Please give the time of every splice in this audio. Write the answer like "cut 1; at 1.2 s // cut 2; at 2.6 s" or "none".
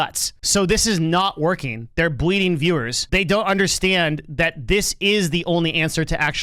none